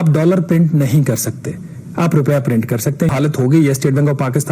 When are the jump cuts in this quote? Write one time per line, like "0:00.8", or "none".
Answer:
0:03.1